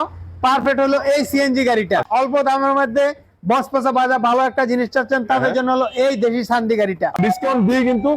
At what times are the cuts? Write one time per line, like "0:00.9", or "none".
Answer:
0:02.0
0:07.2